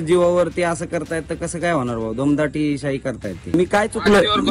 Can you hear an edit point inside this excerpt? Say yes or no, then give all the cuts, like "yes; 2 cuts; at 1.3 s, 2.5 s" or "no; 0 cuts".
yes; 1 cut; at 3.5 s